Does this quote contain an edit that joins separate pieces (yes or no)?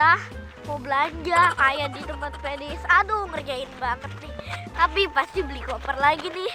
no